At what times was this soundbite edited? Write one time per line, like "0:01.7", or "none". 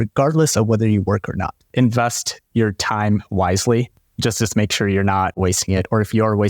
0:01.5
0:05.4